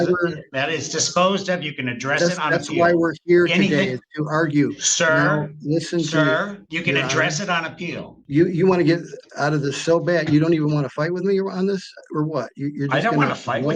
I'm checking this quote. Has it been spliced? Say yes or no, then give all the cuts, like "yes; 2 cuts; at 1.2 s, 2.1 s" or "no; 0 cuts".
yes; 1 cut; at 8.1 s